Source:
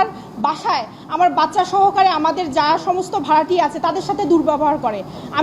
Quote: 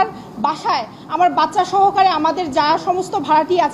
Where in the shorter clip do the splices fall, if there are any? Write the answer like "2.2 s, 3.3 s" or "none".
none

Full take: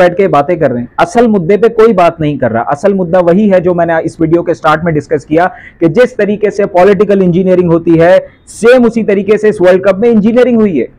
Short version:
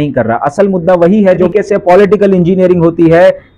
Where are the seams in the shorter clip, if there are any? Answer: 1.5 s

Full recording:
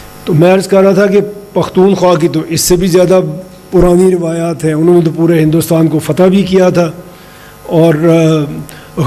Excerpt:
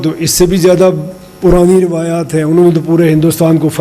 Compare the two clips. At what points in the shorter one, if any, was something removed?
none

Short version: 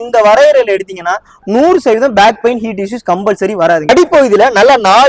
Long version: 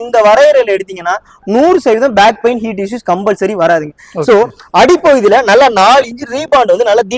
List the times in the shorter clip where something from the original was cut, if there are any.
3.9 s

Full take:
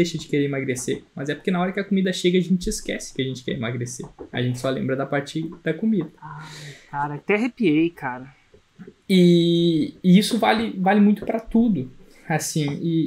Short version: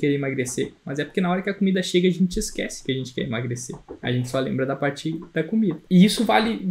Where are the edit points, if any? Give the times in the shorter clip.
5.8 s

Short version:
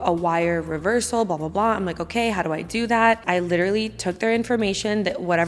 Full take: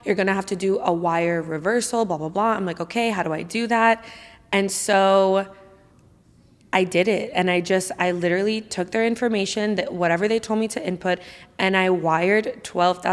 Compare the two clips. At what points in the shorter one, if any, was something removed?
3.2 s

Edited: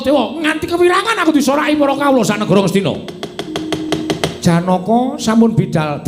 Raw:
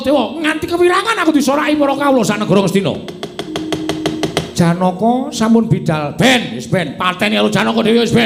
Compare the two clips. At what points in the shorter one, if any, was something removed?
3.8 s

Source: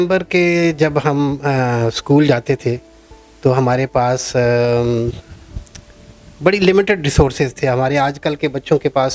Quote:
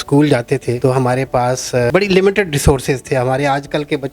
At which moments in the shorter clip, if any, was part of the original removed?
0.8 s, 1.9 s

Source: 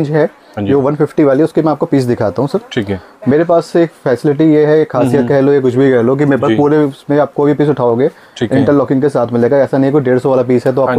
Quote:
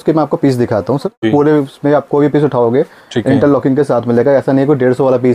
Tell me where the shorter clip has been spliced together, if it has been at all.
1.2 s

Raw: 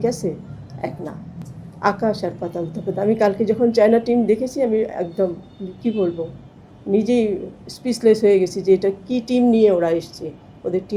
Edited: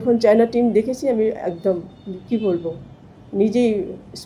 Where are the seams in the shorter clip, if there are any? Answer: none

